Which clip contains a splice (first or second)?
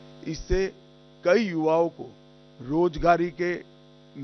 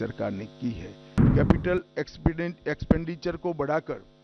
second